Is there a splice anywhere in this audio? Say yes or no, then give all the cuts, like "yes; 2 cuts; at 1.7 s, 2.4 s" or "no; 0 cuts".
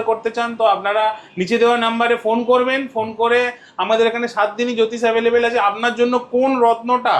no; 0 cuts